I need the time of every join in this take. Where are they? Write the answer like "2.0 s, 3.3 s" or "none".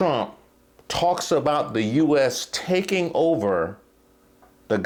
none